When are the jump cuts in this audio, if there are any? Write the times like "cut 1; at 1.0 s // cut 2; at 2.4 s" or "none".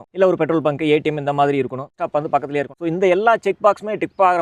cut 1; at 2.3 s

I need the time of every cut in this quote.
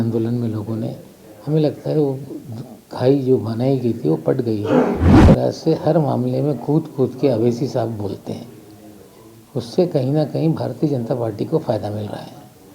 cut 1; at 5.2 s

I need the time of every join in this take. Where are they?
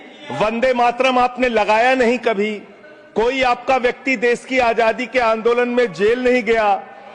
none

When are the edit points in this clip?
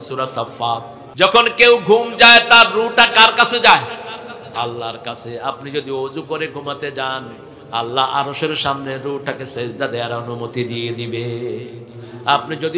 cut 1; at 1.0 s

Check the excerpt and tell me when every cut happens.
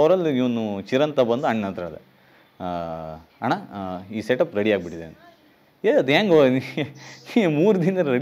none

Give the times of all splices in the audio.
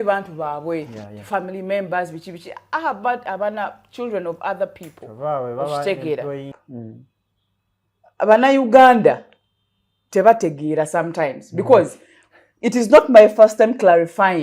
cut 1; at 6.6 s

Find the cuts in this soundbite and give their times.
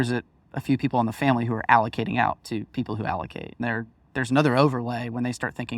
cut 1; at 3.6 s

